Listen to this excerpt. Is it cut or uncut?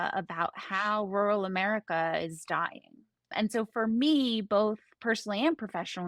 uncut